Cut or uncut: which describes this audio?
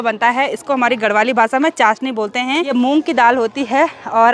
cut